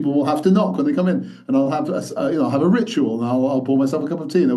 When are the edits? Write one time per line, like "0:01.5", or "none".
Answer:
none